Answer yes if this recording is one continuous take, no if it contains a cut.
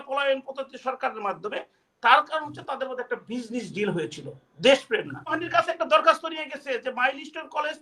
no